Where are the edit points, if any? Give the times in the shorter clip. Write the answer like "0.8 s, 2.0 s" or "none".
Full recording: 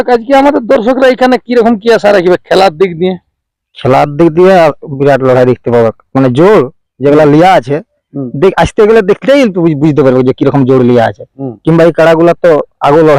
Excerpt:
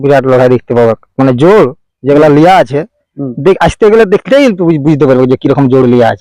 none